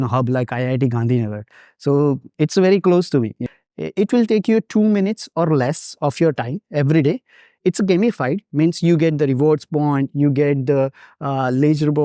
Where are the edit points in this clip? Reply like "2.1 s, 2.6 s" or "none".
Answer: 3.4 s